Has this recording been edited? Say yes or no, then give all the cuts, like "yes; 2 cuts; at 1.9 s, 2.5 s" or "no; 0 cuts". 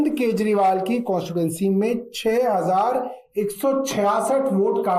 no; 0 cuts